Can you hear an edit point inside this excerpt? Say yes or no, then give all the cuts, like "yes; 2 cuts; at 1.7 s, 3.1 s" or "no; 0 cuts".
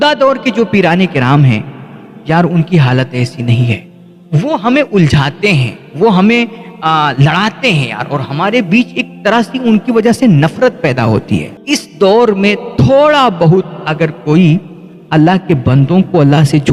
yes; 1 cut; at 11.5 s